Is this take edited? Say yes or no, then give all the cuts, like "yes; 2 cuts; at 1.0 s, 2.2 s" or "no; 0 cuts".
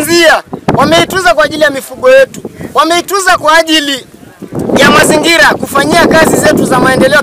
no; 0 cuts